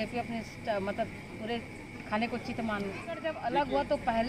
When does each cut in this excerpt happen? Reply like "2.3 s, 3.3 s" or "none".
3.3 s